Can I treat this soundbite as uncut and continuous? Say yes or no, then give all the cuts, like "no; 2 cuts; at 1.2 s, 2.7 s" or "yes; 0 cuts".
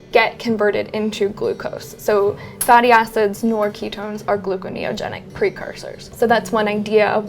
no; 1 cut; at 6.1 s